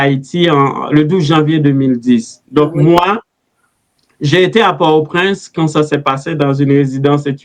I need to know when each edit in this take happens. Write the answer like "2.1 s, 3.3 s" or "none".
none